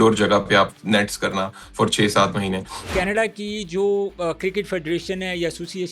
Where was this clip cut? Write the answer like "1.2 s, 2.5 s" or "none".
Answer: 2.9 s